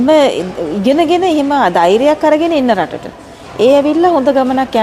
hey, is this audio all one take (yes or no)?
yes